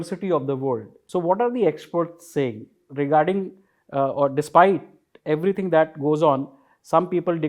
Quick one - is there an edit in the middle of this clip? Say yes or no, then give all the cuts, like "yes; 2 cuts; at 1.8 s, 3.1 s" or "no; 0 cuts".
yes; 1 cut; at 0.9 s